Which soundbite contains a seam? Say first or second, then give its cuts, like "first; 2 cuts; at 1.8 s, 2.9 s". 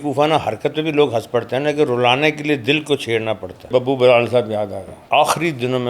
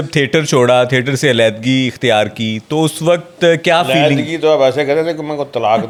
first; 2 cuts; at 3.7 s, 4.9 s